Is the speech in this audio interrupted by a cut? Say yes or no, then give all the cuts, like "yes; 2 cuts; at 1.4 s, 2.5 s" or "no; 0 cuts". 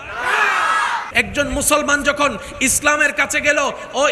yes; 1 cut; at 1.1 s